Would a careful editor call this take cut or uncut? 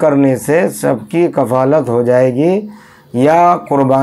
uncut